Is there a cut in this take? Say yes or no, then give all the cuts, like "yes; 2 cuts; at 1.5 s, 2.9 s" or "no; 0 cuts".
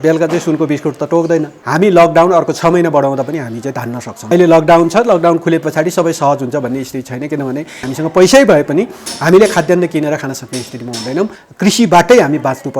yes; 4 cuts; at 1.6 s, 4.3 s, 7.6 s, 11.4 s